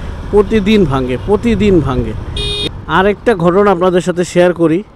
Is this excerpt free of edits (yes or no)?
no